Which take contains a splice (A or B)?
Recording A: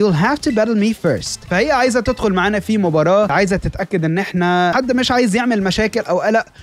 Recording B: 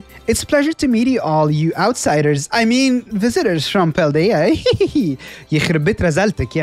A